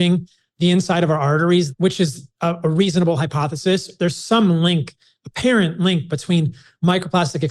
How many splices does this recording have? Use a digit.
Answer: 1